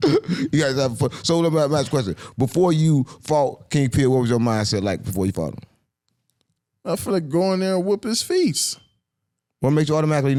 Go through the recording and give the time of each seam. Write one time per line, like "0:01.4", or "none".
none